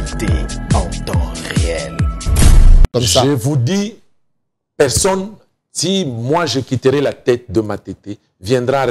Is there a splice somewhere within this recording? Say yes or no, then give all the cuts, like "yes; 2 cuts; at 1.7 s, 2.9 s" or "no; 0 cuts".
yes; 1 cut; at 2.9 s